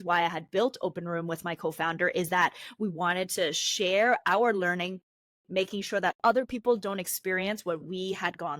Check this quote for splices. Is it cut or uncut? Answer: uncut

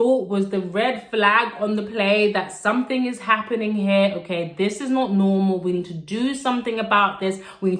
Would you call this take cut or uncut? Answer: uncut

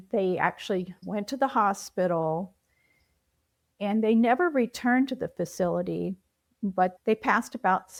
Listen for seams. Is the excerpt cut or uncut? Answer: uncut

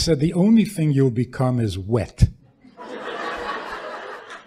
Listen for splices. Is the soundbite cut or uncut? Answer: uncut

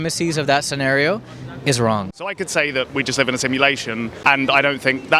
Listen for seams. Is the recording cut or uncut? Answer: cut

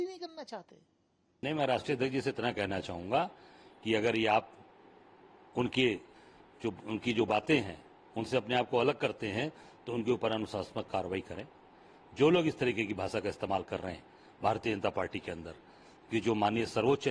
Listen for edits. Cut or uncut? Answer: cut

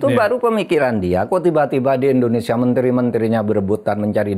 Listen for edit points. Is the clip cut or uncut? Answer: uncut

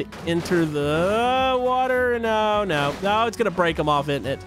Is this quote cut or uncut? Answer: uncut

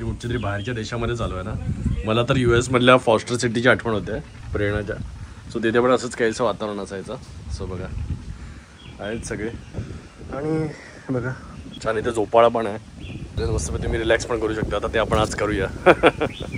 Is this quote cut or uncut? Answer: uncut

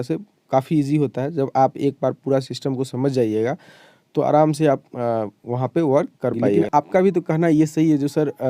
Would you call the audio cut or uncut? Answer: cut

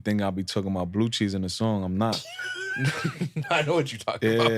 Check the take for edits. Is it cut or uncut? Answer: uncut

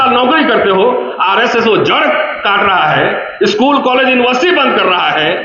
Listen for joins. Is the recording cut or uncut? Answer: uncut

